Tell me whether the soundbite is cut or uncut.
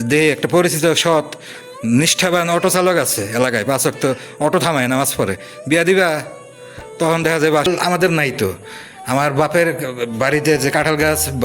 cut